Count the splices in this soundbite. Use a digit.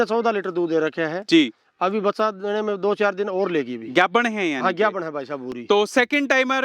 0